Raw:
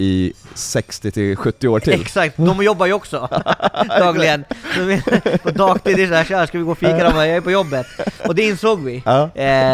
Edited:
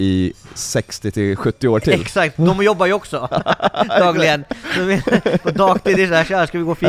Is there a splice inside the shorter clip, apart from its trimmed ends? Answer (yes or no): no